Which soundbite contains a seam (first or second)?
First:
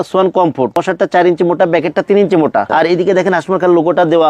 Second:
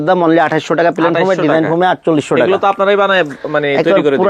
first